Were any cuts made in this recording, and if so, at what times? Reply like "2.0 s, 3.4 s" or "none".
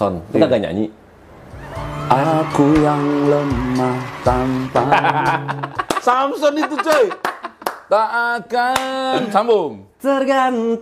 none